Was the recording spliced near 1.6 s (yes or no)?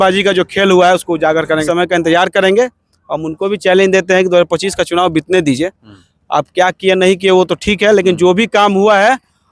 yes